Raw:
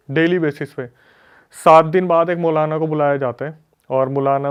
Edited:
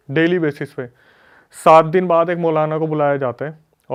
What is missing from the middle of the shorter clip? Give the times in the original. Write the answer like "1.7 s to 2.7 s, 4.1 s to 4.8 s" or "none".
none